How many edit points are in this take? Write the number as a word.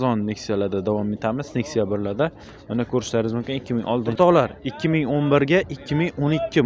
one